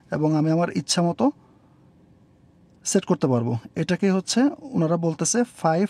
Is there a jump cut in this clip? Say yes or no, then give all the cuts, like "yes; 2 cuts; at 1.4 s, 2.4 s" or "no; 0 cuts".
no; 0 cuts